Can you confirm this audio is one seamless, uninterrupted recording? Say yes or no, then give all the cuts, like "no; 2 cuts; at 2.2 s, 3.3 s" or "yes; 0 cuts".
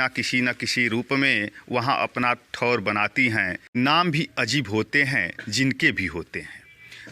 no; 1 cut; at 3.7 s